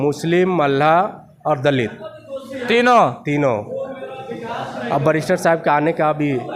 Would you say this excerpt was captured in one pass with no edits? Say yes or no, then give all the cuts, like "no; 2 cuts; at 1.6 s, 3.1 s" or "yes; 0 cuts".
yes; 0 cuts